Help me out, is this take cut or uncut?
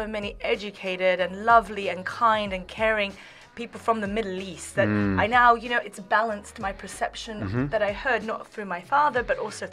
uncut